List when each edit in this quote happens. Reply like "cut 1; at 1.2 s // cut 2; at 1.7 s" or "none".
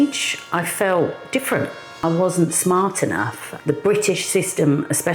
cut 1; at 2.0 s // cut 2; at 3.4 s